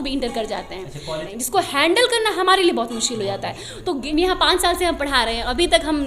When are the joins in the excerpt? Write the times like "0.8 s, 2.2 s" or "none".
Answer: 1.3 s, 4.0 s